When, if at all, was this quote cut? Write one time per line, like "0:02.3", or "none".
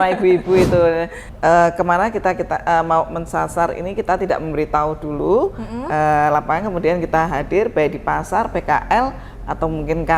0:01.2